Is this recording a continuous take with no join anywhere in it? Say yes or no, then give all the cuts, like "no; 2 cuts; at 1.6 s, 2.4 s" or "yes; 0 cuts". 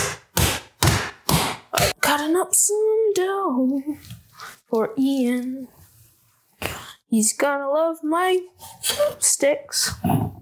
no; 1 cut; at 2.0 s